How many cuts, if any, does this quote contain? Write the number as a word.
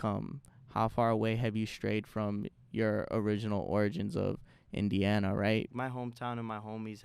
one